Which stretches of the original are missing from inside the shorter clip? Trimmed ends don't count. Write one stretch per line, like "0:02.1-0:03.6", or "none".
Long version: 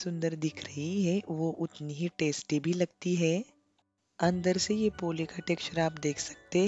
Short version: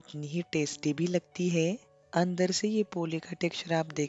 0:03.6-0:04.0